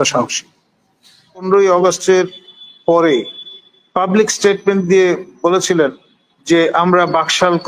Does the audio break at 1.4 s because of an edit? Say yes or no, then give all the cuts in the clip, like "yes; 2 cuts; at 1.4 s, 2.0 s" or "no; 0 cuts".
yes; 1 cut; at 1.4 s